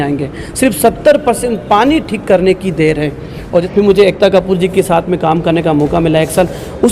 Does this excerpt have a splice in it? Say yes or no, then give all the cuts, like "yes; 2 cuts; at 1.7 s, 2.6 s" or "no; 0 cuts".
yes; 1 cut; at 3.7 s